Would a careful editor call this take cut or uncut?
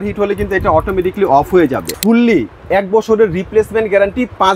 cut